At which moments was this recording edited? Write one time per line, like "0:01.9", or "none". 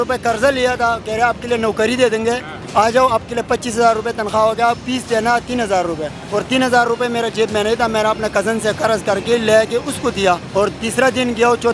0:02.5
0:06.1
0:10.4